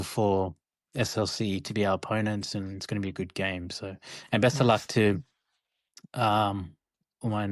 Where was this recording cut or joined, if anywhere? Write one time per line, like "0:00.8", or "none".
none